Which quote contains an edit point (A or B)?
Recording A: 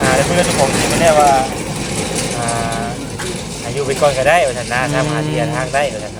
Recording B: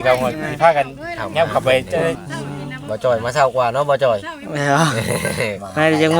B